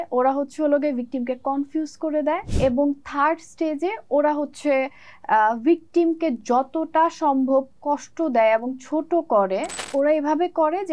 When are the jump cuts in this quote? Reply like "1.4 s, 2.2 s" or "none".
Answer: 2.5 s, 9.8 s

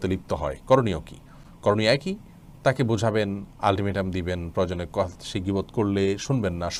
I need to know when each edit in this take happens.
none

